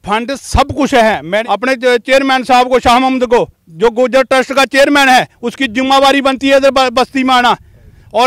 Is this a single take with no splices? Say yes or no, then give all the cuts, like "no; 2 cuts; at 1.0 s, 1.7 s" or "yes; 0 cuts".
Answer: no; 1 cut; at 1.4 s